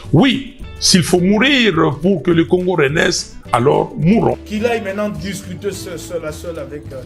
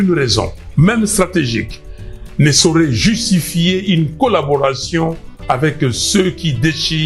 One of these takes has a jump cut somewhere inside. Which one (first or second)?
first